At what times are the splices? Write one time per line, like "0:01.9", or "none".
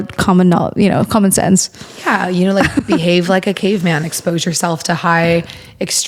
none